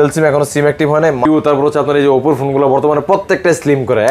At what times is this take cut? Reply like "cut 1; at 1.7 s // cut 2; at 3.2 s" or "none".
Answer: cut 1; at 1.2 s